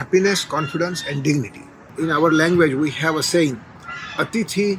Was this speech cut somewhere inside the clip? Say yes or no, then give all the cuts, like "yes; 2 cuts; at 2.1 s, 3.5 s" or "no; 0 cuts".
yes; 1 cut; at 1.9 s